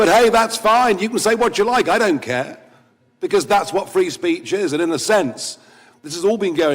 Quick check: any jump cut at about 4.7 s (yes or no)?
yes